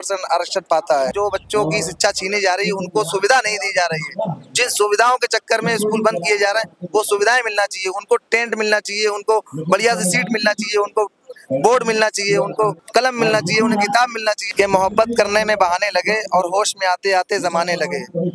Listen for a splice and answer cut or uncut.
cut